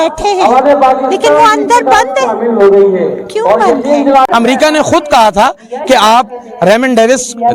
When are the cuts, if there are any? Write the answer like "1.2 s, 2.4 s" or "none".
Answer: 4.3 s